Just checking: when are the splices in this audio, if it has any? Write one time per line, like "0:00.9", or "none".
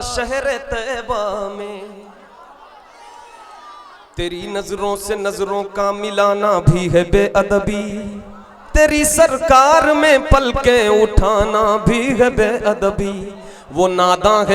none

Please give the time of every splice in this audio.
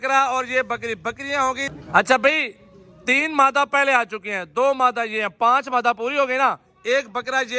0:01.7

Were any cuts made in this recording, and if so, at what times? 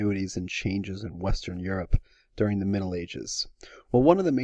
0:02.1

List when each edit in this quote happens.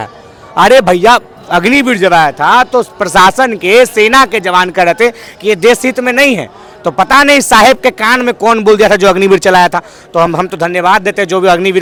none

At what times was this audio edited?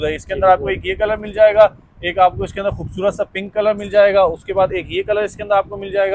none

